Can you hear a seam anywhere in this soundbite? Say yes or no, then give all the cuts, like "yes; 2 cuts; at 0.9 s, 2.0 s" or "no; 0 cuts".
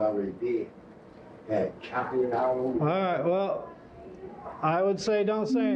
no; 0 cuts